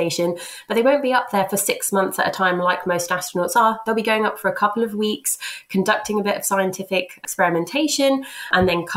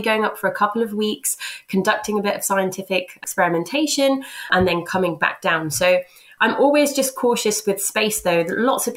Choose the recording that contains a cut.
second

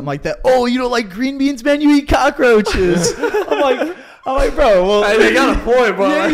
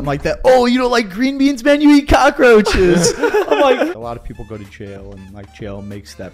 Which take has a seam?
second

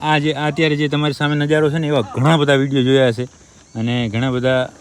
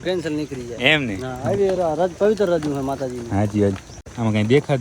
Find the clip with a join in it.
second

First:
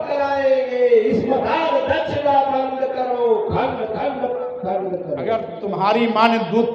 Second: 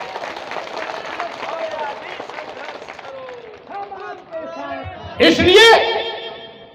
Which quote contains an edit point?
first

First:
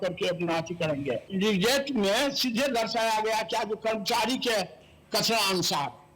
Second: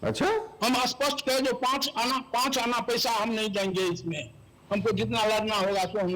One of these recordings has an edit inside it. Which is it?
first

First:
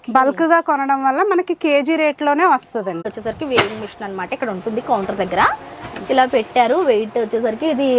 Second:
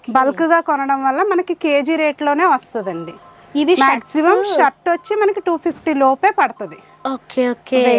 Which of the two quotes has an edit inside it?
first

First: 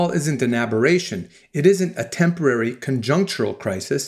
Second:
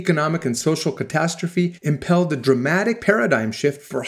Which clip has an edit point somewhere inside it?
second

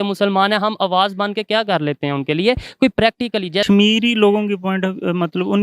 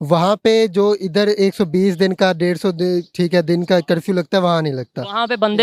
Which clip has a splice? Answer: first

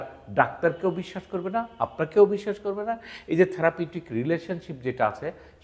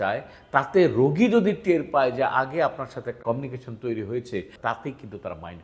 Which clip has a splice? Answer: second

